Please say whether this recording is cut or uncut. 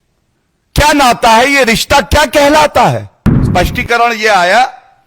cut